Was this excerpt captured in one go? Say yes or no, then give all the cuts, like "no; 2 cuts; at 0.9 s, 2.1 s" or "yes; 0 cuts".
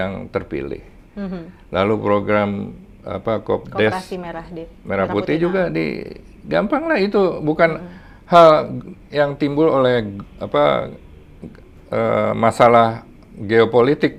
yes; 0 cuts